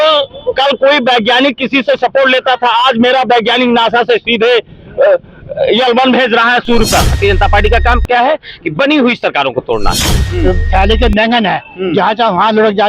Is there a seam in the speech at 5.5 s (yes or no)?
no